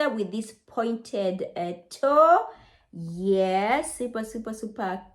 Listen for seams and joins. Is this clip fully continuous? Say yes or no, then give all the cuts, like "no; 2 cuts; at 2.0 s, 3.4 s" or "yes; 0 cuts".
yes; 0 cuts